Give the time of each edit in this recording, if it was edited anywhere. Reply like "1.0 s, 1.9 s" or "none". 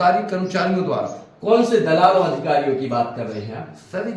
none